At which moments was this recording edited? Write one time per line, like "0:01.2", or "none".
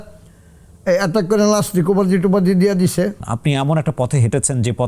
0:03.3